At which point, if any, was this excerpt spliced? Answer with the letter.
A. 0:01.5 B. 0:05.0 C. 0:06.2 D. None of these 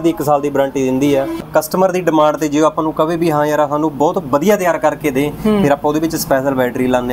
A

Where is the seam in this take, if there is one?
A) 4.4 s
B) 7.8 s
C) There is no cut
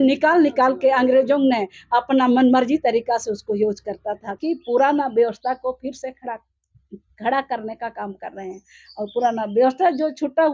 A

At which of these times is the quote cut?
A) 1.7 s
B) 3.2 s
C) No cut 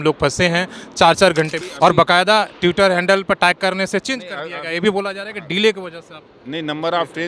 A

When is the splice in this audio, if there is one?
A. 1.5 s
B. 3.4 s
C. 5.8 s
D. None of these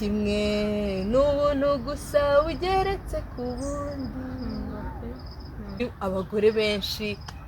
C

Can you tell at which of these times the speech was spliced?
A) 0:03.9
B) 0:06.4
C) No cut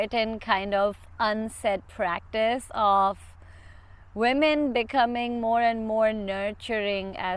C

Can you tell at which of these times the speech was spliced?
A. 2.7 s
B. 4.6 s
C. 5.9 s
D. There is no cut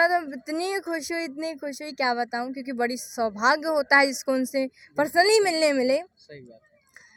D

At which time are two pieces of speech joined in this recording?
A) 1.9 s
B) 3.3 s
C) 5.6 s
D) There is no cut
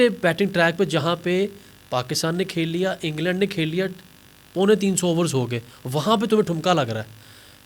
D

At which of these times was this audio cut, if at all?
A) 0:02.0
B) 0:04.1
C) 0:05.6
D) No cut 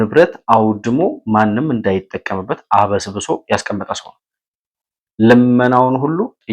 D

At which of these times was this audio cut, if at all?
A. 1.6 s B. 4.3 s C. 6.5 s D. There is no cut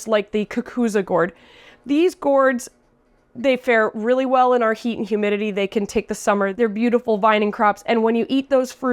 C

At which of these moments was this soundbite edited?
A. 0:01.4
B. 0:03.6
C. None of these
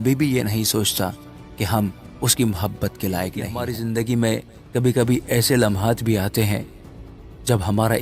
B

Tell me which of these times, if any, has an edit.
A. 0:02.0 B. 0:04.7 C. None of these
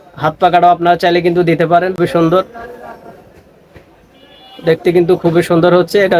A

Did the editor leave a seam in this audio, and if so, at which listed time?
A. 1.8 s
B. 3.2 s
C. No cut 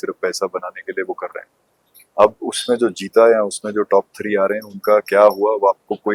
C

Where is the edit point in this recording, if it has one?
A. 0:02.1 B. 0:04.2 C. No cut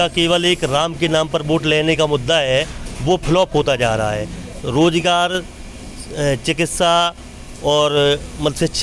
C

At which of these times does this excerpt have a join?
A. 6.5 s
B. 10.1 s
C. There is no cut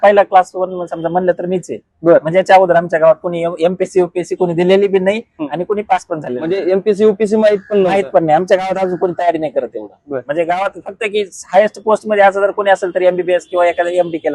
C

